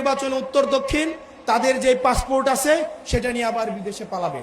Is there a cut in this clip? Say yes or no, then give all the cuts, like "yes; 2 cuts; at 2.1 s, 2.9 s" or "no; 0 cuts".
no; 0 cuts